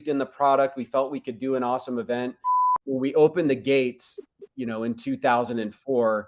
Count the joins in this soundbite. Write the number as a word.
one